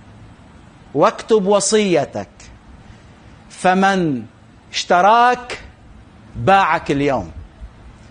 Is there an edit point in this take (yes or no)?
no